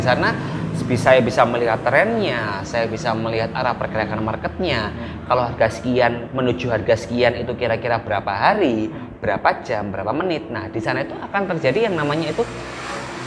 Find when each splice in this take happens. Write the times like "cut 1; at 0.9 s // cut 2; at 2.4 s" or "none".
none

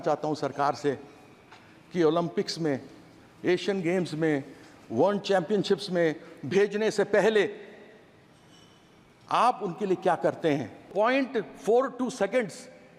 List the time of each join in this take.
cut 1; at 10.9 s

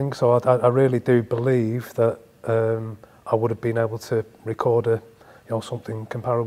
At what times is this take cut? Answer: none

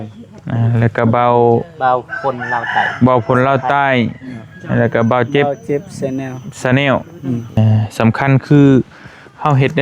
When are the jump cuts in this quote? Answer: cut 1; at 7.6 s

